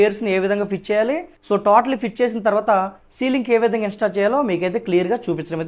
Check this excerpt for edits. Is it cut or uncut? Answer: cut